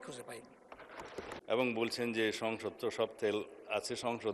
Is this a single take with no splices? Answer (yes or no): no